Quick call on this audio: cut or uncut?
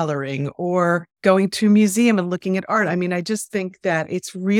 cut